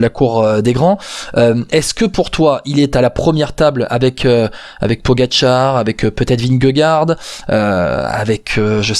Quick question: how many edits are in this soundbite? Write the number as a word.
zero